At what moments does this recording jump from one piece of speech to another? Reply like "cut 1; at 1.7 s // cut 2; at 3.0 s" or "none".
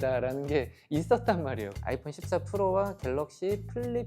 cut 1; at 1.7 s